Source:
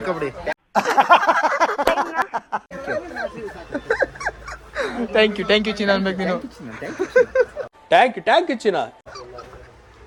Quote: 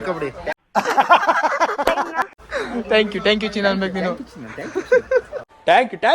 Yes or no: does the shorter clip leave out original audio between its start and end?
yes